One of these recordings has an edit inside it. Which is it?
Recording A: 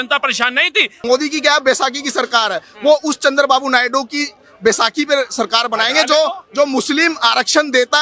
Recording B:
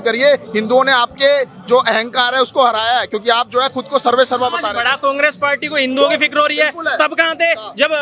A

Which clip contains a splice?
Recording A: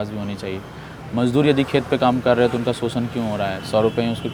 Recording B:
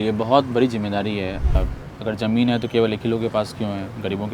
B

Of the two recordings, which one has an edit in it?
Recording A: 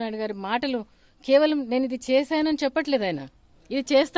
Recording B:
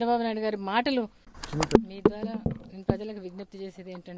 B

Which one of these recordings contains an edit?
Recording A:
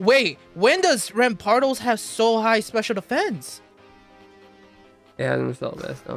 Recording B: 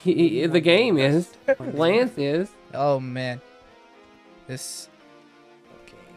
B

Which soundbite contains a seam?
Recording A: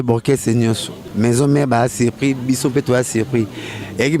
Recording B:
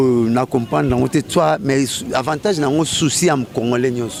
A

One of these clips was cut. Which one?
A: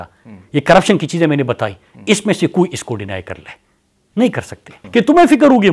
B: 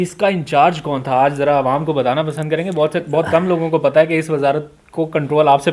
A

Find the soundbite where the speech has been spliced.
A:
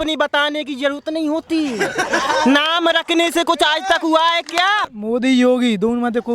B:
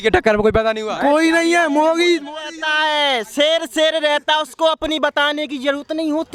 A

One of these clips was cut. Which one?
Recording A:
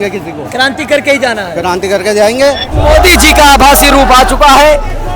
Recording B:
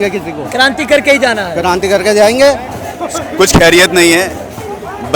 A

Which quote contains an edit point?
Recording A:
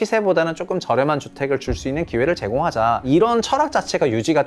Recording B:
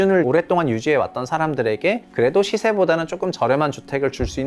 A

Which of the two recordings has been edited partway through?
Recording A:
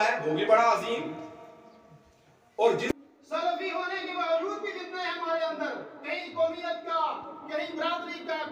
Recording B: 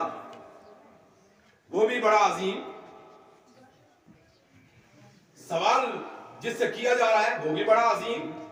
A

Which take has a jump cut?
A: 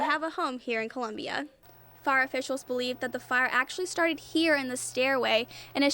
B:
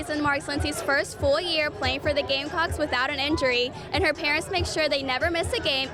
A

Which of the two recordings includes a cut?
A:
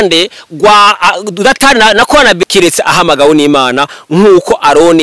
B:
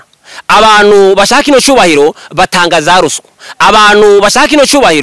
A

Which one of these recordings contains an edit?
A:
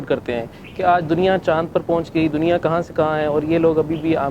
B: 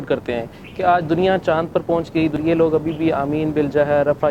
B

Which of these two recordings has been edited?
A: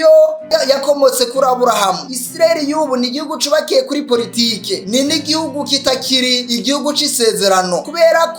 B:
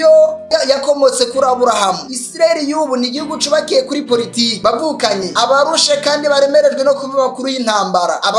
B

